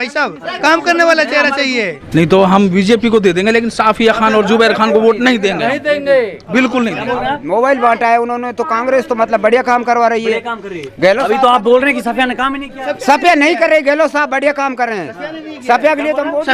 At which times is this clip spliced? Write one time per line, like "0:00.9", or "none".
0:02.0
0:07.4